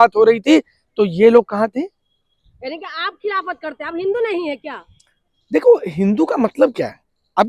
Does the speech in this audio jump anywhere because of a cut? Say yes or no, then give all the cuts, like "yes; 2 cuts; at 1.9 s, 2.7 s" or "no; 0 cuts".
no; 0 cuts